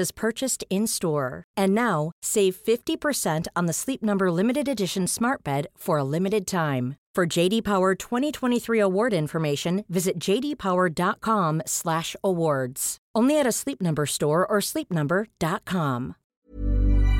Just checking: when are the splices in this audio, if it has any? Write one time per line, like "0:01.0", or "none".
0:16.2